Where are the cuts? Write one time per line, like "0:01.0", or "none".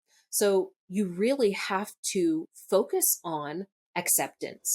0:03.8